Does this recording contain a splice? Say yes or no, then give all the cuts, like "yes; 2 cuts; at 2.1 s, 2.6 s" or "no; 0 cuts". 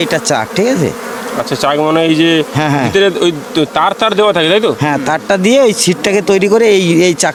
no; 0 cuts